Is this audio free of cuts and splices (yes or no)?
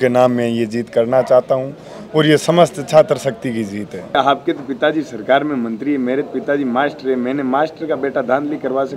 no